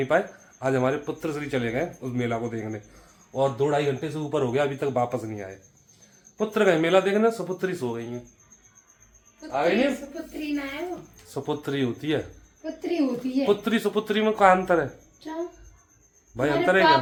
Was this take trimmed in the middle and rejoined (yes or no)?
no